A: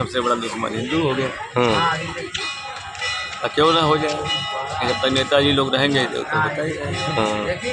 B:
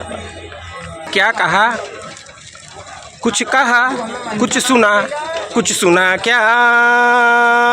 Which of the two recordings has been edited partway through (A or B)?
B